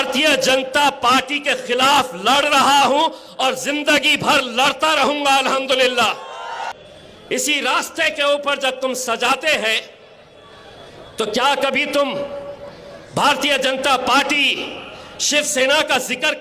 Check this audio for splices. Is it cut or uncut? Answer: cut